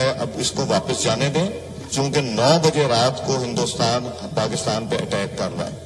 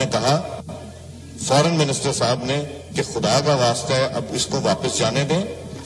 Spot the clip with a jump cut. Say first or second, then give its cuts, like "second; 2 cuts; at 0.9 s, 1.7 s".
second; 1 cut; at 1.0 s